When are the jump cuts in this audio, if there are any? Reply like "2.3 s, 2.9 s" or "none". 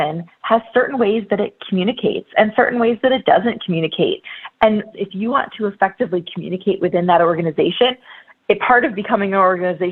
4.9 s